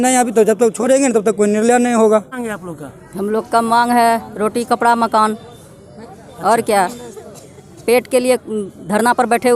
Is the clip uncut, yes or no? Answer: no